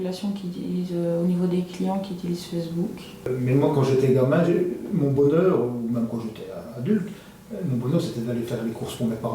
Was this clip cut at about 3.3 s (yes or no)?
yes